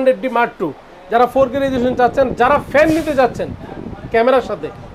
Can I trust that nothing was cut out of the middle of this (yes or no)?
yes